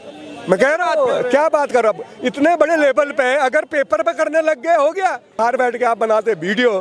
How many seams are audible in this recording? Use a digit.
1